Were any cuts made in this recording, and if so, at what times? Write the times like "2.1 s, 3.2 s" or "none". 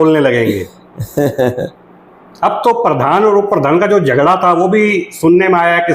none